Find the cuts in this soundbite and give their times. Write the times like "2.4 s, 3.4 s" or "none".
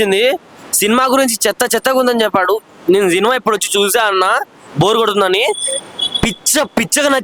none